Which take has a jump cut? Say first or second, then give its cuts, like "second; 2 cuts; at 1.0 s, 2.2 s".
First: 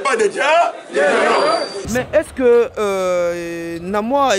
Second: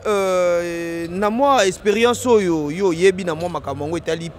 first; 1 cut; at 1.8 s